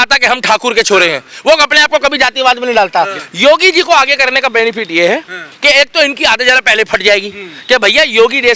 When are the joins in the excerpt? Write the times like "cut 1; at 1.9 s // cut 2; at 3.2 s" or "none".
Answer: cut 1; at 3.2 s